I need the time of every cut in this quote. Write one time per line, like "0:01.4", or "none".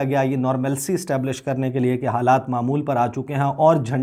none